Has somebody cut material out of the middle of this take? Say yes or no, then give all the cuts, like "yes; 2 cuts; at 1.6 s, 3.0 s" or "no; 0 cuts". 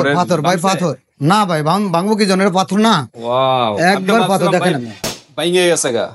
no; 0 cuts